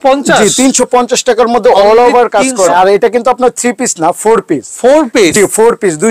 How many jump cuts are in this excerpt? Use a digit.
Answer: 1